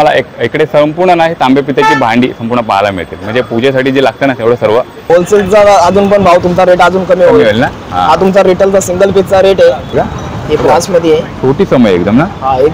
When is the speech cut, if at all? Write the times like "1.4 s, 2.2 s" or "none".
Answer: 5.1 s, 9.9 s